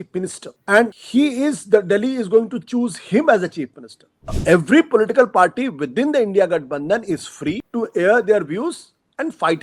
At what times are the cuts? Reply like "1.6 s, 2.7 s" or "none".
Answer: 4.4 s